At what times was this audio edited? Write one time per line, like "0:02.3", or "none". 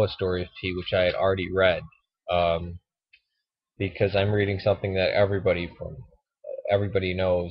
none